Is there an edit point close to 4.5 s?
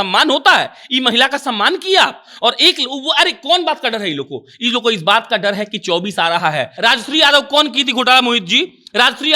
no; 1 cut; at 6.7 s

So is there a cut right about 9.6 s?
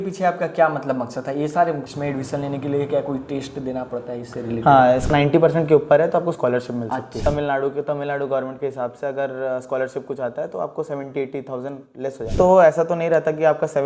no; 4 cuts; at 1.9 s, 5.1 s, 7.2 s, 12.4 s

